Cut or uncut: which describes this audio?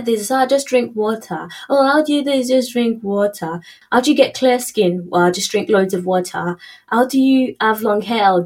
uncut